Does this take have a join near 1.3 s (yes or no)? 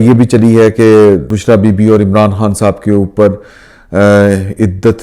yes